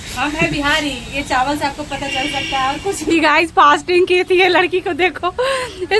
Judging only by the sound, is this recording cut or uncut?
cut